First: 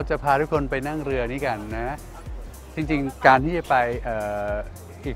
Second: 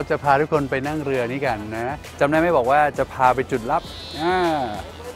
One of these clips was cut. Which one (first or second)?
second